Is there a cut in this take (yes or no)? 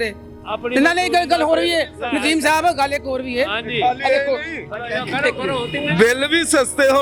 no